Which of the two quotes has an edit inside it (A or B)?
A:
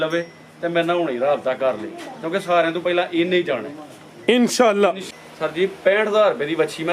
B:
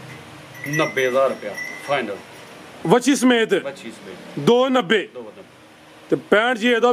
A